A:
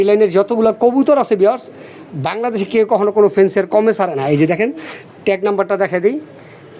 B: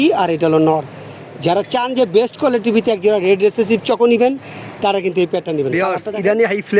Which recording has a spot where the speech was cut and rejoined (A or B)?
B